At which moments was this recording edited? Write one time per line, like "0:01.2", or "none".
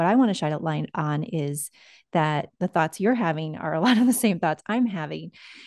none